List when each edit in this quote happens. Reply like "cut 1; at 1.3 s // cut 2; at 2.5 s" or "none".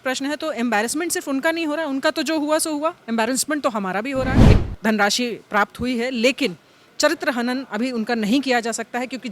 cut 1; at 4.4 s